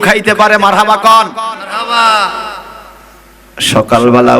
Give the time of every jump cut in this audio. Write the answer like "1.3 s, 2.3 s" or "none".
none